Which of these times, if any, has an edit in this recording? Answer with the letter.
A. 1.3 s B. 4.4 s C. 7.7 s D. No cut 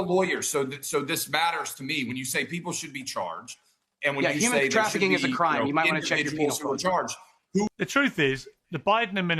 C